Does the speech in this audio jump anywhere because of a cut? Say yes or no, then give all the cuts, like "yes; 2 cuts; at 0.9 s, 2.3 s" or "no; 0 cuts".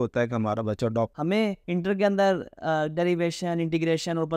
yes; 1 cut; at 1.1 s